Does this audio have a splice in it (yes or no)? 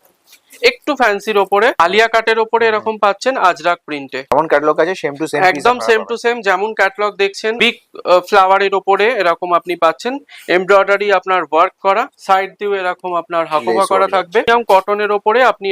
yes